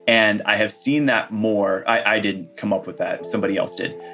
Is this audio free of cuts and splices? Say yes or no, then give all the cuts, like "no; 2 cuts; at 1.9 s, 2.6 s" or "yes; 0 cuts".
no; 1 cut; at 3.2 s